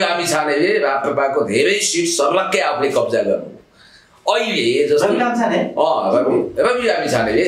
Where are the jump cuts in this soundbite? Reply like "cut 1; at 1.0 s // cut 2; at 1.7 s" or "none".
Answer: none